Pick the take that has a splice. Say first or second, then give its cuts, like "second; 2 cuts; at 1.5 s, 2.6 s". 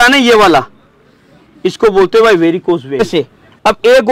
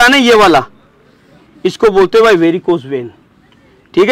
first; 1 cut; at 3.0 s